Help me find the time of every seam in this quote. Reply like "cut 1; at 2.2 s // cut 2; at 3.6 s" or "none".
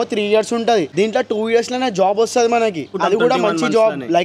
cut 1; at 0.9 s // cut 2; at 2.9 s